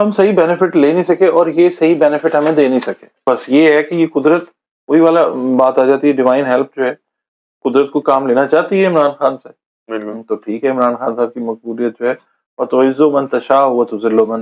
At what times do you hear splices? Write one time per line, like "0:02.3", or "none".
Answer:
0:03.2